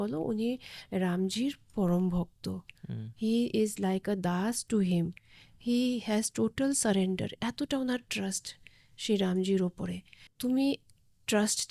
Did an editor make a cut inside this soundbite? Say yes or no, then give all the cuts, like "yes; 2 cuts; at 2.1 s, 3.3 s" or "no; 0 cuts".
yes; 1 cut; at 10.3 s